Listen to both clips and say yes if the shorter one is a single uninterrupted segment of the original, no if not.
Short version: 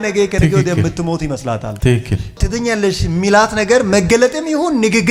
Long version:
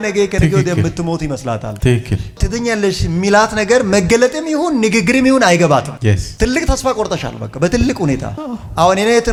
yes